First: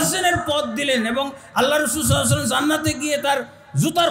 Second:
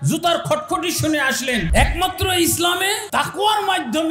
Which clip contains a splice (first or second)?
second